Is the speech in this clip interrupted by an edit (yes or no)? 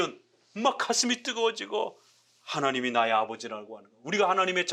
no